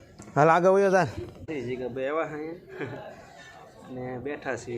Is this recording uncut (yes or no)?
no